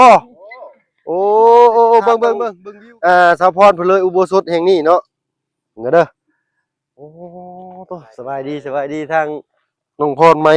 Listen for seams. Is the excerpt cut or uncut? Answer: cut